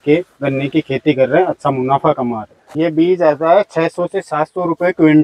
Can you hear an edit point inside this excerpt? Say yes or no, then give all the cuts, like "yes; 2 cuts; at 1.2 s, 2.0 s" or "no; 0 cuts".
yes; 1 cut; at 2.6 s